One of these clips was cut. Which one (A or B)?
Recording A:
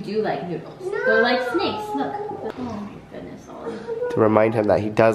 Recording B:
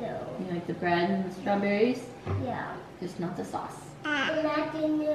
A